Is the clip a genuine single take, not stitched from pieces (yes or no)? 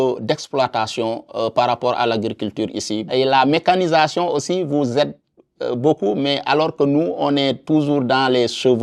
no